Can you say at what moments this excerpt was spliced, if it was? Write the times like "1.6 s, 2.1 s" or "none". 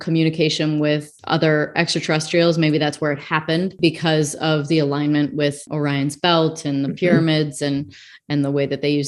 1.1 s, 3.7 s, 5.7 s